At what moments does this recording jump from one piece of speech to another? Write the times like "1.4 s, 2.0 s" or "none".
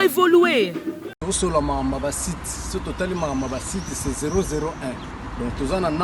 1.1 s